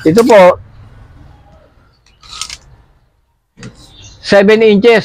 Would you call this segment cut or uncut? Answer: uncut